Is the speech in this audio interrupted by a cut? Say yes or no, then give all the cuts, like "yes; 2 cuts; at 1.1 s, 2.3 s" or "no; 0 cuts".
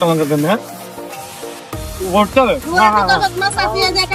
no; 0 cuts